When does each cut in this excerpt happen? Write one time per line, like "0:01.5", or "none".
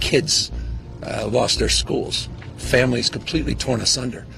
none